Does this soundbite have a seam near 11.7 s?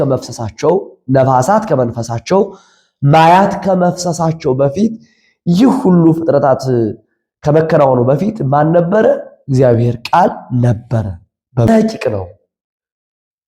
yes; 1 cut; at 11.7 s

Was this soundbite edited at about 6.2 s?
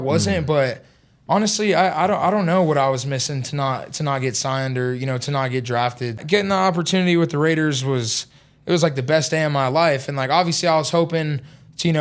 yes; 1 cut; at 6.2 s

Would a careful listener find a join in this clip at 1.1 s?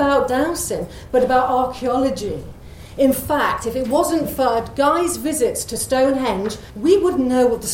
no; 1 cut; at 6.6 s

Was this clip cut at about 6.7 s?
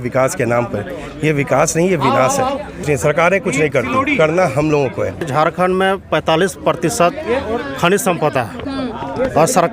no; 2 cuts; at 2.8 s, 5.3 s

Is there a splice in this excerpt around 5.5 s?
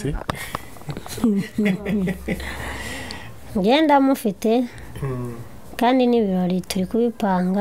no; 1 cut; at 3.4 s

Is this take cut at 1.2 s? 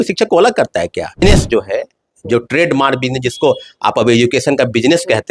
yes; 1 cut; at 1.2 s

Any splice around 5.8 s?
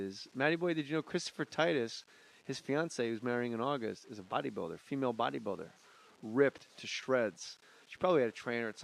yes; 1 cut; at 5.8 s

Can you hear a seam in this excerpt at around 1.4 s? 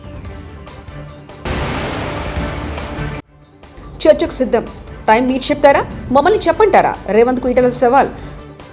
yes; 2 cuts; at 1.4 s, 3.0 s

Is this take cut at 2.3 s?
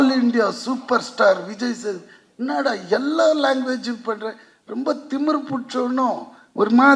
no; 0 cuts

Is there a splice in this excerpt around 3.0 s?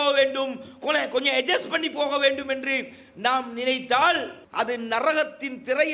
no; 1 cut; at 4.4 s

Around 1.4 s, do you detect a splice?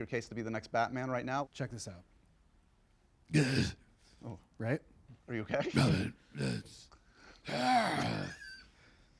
yes; 1 cut; at 1.4 s

